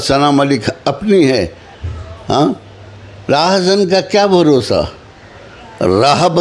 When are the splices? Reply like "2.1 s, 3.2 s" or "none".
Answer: 1.8 s